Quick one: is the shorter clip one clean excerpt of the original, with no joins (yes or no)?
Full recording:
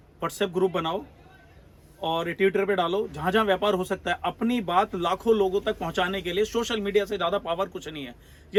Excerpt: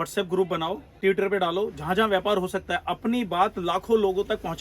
no